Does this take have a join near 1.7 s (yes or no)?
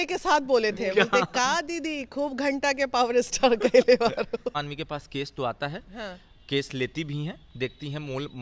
no